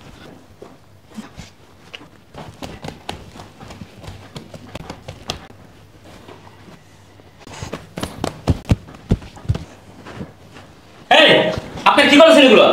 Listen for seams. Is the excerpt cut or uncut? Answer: cut